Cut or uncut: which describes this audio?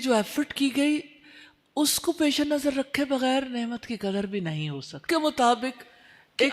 cut